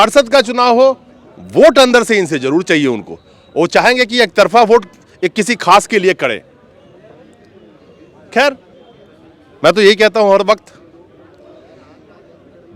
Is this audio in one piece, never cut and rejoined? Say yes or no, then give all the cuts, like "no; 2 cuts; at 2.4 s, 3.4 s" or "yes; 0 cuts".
yes; 0 cuts